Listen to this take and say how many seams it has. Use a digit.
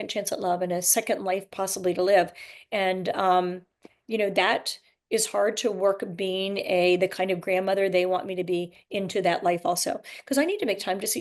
0